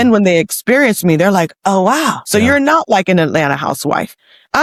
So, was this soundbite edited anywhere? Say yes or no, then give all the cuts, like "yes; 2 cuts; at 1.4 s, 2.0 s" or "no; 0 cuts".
no; 0 cuts